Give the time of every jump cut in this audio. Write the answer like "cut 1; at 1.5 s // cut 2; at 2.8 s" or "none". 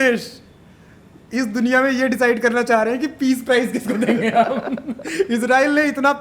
none